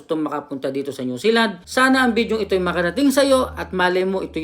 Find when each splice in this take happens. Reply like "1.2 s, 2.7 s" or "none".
1.6 s